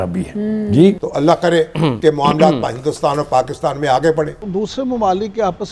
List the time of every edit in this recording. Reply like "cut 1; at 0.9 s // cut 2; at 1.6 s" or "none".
cut 1; at 1.1 s // cut 2; at 4.4 s

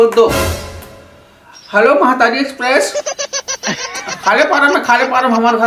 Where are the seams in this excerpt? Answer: cut 1; at 4.7 s

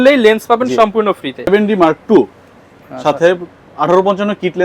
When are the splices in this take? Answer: cut 1; at 1.5 s

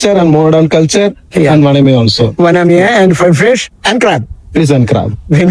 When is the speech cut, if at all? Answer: none

